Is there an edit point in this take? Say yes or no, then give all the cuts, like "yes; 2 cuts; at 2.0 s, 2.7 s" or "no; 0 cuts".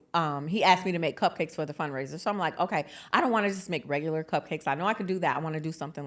no; 0 cuts